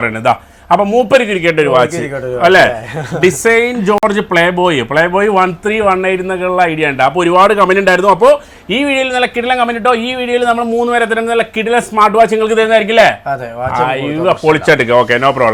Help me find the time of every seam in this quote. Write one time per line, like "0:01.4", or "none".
none